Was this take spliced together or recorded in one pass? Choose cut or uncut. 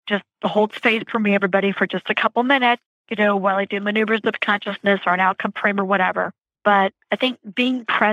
cut